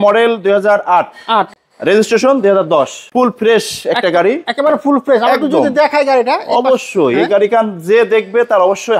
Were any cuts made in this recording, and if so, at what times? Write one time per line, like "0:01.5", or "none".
0:01.6
0:03.0

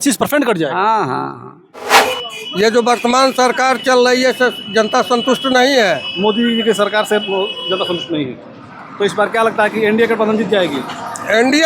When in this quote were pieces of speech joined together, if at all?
0:01.9

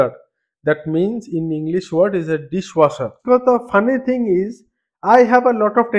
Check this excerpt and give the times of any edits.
0:03.1

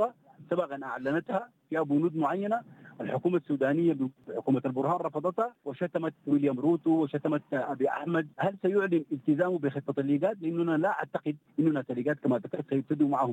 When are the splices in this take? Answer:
0:04.3
0:05.6
0:08.3
0:11.4

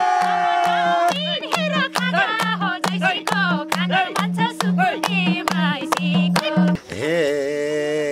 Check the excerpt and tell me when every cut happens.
0:06.8

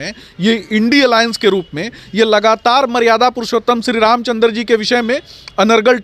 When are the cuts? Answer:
none

